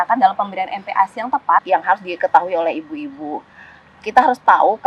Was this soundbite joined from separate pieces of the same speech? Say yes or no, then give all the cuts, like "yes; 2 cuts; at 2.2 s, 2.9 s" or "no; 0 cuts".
yes; 1 cut; at 1.6 s